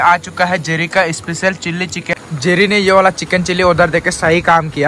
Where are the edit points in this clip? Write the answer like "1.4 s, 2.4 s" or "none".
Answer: 2.1 s